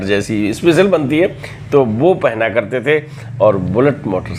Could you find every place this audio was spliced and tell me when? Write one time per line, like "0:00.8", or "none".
none